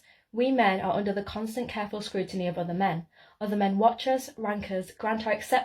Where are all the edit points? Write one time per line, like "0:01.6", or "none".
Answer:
0:03.5